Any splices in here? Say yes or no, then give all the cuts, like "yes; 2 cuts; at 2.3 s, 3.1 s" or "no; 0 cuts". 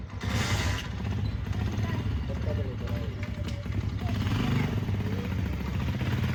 no; 0 cuts